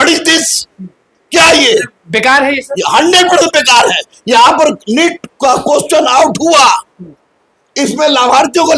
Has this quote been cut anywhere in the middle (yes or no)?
no